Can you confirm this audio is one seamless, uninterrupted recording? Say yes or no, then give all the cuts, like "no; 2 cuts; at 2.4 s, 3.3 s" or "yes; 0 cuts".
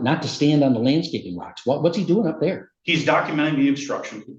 yes; 0 cuts